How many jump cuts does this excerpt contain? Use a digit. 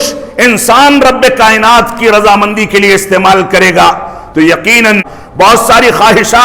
1